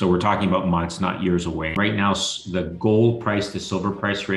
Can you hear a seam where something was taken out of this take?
yes; 1 cut; at 1.8 s

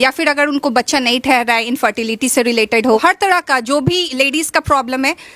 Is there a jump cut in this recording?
yes; 1 cut; at 3.0 s

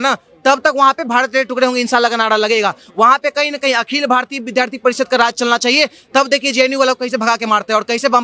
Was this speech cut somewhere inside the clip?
no; 0 cuts

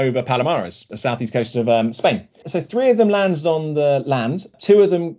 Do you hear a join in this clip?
no; 0 cuts

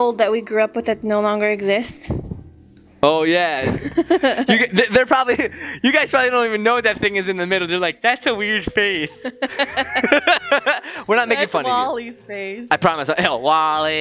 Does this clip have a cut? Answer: no; 0 cuts

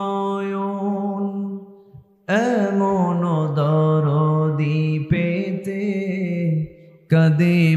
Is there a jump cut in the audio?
no; 0 cuts

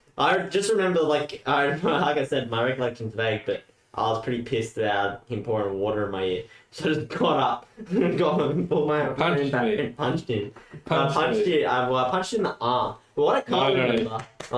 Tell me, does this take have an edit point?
no; 0 cuts

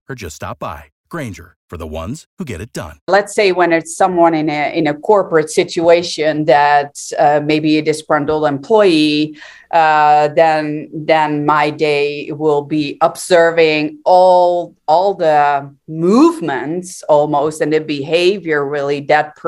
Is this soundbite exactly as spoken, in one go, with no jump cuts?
no; 1 cut; at 3.1 s

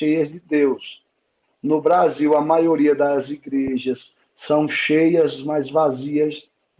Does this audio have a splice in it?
no; 0 cuts

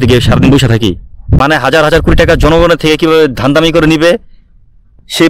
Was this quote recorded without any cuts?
no; 1 cut; at 1.4 s

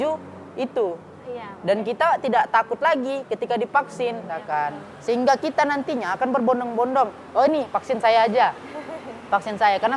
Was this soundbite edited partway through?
yes; 1 cut; at 4.3 s

